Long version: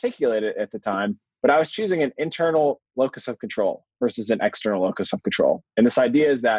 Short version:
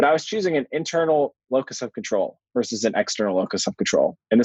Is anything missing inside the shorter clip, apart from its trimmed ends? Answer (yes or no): no